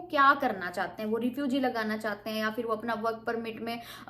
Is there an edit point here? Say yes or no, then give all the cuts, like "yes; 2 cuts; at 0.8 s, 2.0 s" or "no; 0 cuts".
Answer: no; 0 cuts